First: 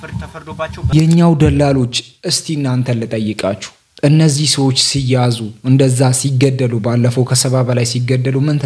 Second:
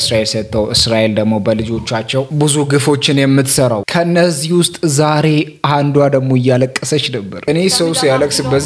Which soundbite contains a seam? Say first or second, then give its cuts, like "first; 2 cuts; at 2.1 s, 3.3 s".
first; 1 cut; at 0.9 s